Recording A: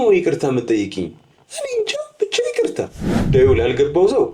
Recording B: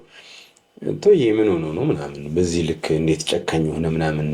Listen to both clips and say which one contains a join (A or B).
A